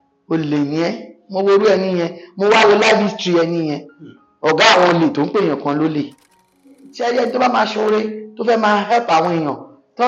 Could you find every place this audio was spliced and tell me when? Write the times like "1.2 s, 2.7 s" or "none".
6.8 s